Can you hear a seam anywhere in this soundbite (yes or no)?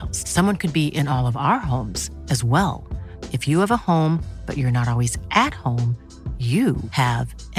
no